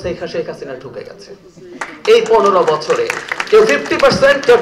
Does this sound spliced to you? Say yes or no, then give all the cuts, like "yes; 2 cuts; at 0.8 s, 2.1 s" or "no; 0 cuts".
no; 0 cuts